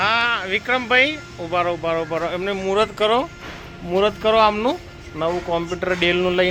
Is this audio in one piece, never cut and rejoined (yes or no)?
yes